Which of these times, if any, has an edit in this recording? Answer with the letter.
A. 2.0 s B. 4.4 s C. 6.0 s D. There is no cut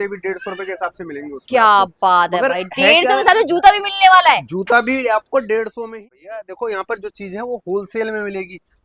C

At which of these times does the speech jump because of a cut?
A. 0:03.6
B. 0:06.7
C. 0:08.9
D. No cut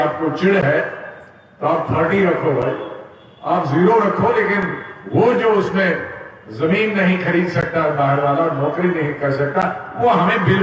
D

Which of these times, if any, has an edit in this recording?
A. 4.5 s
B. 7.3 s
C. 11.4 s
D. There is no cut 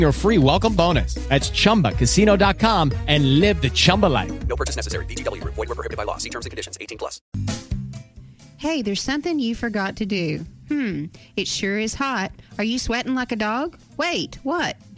B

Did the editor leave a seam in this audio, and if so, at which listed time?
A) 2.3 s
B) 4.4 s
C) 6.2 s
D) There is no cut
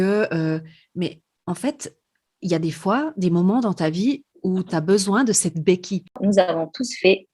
C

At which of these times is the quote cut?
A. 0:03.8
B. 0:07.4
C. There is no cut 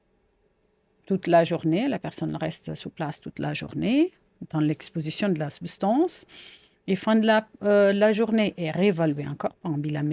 C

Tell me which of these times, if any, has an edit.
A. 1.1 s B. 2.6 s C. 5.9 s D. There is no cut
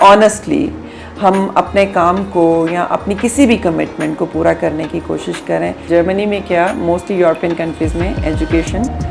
C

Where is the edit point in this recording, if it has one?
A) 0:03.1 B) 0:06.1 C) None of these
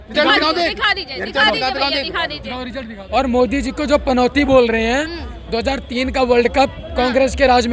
A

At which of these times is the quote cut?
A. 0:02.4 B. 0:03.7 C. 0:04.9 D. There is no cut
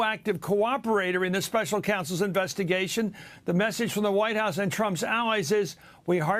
C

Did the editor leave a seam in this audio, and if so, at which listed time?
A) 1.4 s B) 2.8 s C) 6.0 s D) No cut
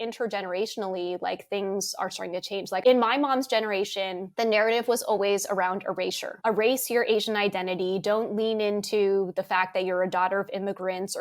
B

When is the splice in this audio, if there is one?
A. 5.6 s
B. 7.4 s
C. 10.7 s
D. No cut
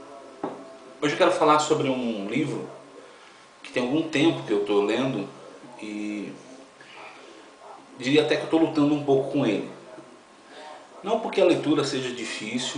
B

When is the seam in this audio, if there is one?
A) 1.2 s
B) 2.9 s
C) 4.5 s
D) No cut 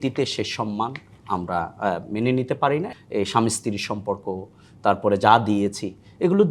B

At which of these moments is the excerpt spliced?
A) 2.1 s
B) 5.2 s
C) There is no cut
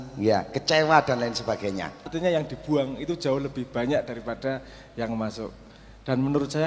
A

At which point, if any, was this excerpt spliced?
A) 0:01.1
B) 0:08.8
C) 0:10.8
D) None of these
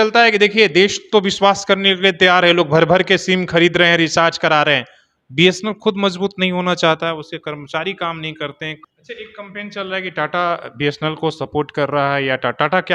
B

